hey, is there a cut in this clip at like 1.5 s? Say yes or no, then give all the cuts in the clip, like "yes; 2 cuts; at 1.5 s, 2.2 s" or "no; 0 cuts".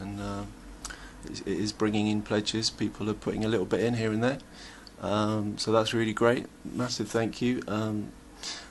yes; 1 cut; at 1.5 s